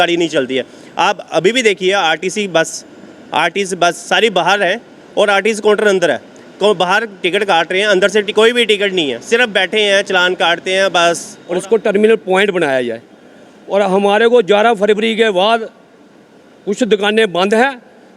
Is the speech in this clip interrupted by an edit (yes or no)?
yes